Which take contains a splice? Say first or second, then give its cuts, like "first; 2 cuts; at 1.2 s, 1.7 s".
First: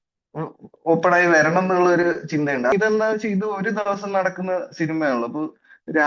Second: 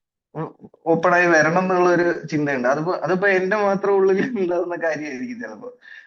first; 1 cut; at 2.7 s